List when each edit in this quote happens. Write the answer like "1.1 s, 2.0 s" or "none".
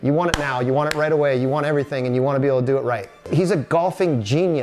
3.2 s